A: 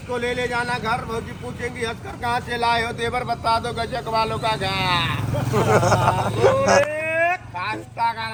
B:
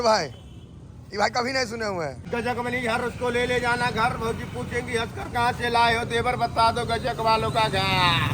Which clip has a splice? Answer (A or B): B